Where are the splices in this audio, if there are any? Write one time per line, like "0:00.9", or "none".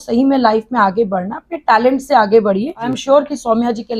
0:02.9